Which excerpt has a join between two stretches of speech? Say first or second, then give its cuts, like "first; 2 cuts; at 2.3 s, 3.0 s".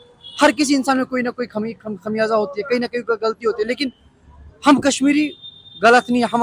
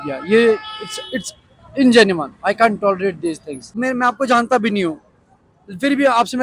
second; 1 cut; at 3.8 s